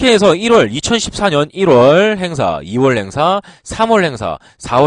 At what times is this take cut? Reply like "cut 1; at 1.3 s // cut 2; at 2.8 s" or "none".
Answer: cut 1; at 2.6 s